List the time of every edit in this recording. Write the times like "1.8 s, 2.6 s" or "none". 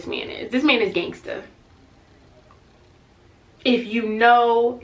none